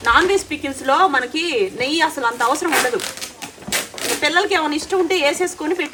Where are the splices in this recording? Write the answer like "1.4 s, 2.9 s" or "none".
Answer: none